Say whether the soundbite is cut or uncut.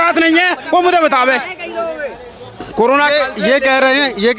uncut